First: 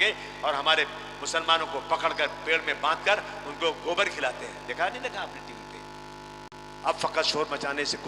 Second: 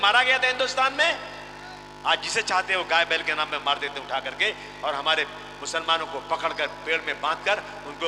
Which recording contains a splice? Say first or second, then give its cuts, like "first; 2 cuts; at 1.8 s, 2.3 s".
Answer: first; 1 cut; at 6.6 s